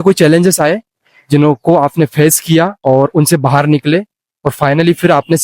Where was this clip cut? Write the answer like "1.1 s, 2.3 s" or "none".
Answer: 2.8 s